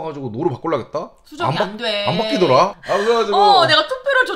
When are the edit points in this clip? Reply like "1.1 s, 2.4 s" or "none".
2.8 s